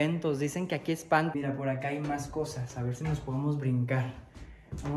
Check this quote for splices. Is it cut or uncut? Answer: cut